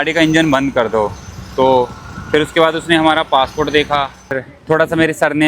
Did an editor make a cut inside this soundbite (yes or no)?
yes